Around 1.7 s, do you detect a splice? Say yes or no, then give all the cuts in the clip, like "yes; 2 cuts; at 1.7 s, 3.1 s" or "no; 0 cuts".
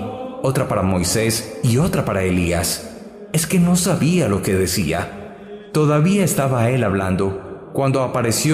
yes; 1 cut; at 1.7 s